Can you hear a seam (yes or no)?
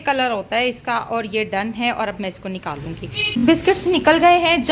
yes